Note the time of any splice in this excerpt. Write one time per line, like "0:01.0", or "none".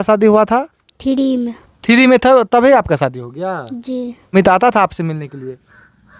0:04.3